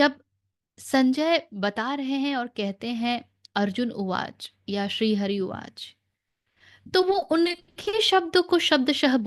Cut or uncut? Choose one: uncut